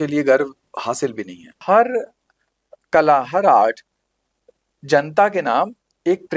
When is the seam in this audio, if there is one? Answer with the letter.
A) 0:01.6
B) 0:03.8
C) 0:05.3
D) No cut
A